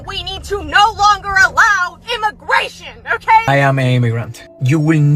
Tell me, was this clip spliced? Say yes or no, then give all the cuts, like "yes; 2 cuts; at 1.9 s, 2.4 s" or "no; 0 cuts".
yes; 1 cut; at 3.5 s